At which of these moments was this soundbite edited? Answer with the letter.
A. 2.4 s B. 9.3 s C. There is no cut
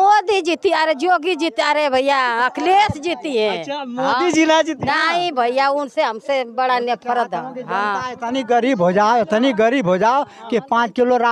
C